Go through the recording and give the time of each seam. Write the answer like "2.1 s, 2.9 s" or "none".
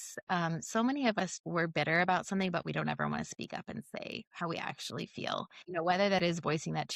1.3 s, 5.6 s